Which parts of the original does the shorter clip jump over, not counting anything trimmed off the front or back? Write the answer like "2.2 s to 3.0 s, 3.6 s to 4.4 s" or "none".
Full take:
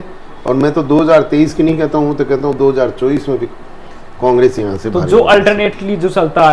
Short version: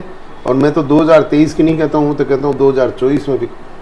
none